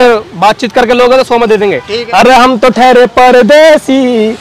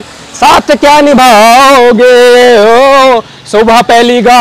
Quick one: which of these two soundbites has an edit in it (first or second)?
first